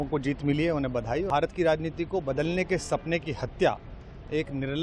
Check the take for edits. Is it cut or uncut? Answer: cut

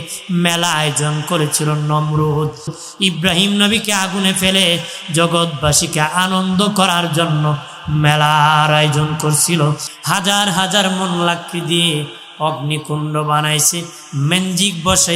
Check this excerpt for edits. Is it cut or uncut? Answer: cut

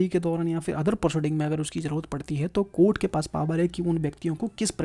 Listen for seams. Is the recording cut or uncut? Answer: uncut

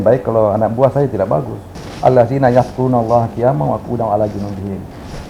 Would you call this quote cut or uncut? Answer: cut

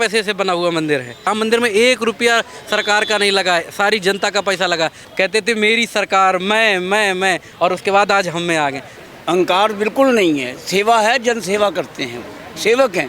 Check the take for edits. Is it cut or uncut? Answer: cut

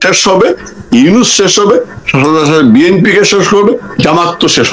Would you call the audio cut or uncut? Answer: uncut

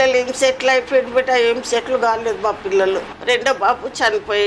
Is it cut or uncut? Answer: cut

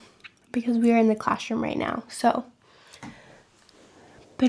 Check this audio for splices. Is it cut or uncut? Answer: uncut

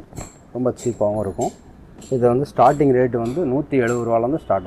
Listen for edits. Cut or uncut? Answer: uncut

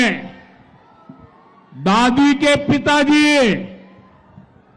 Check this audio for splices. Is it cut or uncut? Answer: uncut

